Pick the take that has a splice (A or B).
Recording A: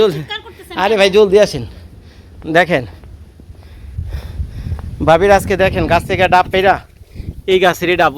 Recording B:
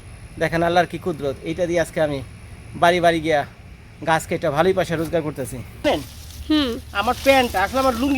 B